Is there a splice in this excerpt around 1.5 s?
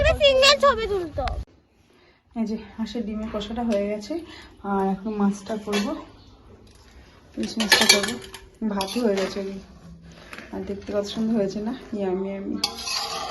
yes; 1 cut; at 1.5 s

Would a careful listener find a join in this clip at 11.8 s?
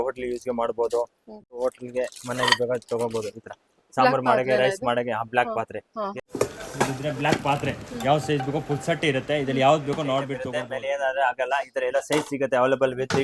no; 3 cuts; at 1.6 s, 6.1 s, 10.5 s

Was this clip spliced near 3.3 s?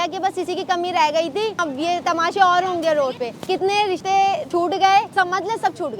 no; 1 cut; at 1.6 s

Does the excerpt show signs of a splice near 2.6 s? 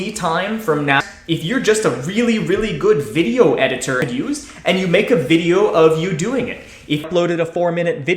no; 3 cuts; at 1.1 s, 3.9 s, 7.0 s

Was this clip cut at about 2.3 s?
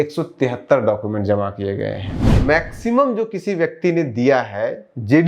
yes; 1 cut; at 2.3 s

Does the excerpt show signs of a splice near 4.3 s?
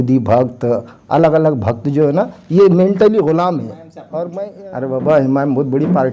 yes; 1 cut; at 4.3 s

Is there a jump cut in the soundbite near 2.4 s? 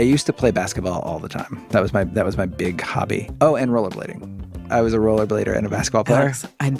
no; 1 cut; at 4.7 s

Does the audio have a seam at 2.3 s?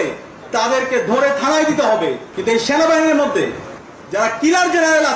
yes; 1 cut; at 2.3 s

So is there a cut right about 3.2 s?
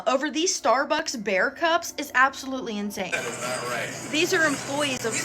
yes; 1 cut; at 3.2 s

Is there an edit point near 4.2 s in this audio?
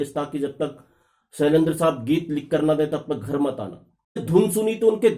yes; 1 cut; at 4.2 s

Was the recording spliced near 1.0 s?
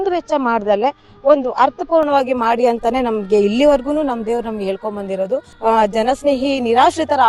no; 1 cut; at 5.5 s

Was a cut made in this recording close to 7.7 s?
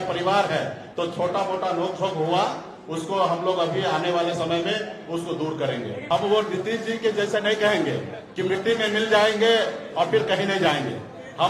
no; 1 cut; at 5.9 s

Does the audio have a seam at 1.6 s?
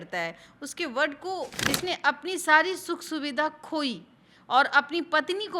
yes; 1 cut; at 1.6 s

